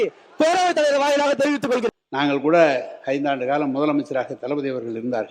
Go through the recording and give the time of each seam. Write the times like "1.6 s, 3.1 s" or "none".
1.9 s